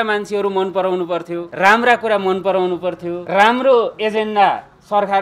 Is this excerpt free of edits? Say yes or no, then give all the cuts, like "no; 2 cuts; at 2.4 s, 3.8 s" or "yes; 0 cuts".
no; 2 cuts; at 1.5 s, 3.2 s